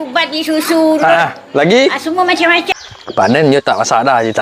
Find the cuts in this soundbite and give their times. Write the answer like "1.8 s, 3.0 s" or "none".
2.7 s